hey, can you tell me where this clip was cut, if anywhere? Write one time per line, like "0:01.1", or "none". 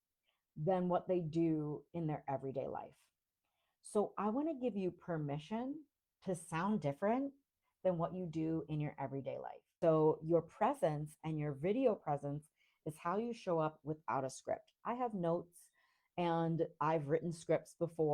0:09.6